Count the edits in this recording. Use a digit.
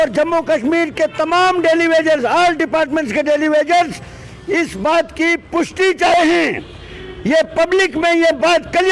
0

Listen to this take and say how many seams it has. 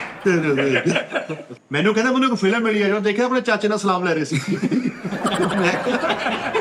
1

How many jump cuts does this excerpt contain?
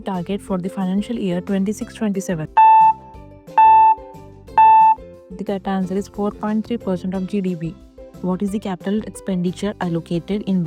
3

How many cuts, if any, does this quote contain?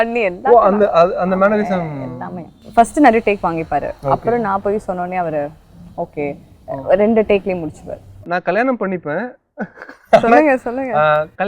2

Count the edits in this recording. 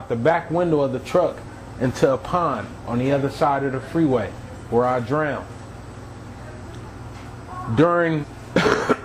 0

